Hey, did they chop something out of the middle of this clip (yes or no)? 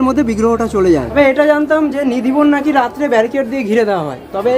yes